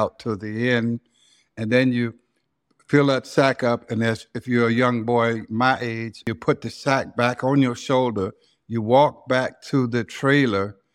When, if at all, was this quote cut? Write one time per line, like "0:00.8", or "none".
0:06.3